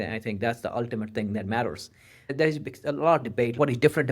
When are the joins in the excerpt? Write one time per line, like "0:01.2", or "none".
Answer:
0:02.3